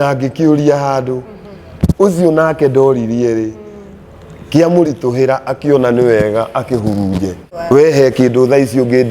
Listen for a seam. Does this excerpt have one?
yes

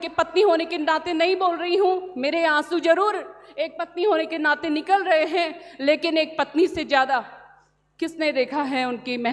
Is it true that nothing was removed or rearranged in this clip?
yes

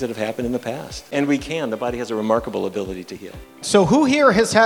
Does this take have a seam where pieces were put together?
yes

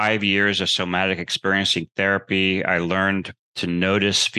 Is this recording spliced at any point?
no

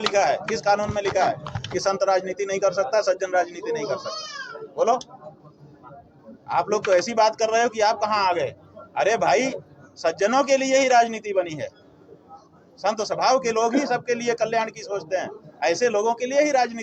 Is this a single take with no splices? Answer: yes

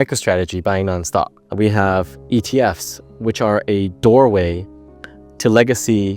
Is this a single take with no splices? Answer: no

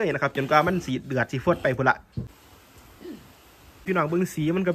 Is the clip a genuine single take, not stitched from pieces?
no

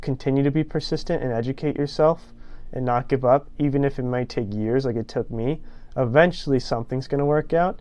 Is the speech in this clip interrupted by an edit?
no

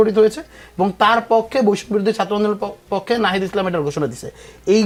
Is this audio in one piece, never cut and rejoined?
yes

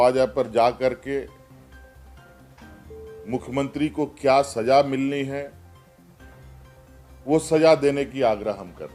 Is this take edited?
no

